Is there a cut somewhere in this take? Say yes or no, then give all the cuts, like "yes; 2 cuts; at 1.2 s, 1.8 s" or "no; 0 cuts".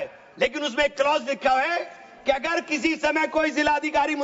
no; 0 cuts